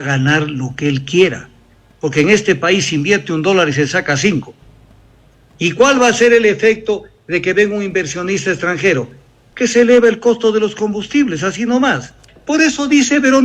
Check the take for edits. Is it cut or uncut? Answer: cut